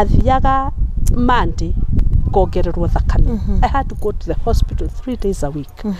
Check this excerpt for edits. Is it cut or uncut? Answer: uncut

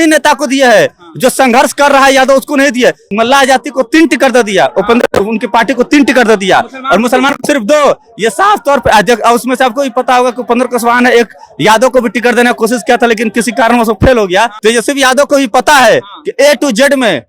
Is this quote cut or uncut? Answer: cut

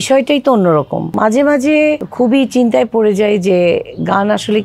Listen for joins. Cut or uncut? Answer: cut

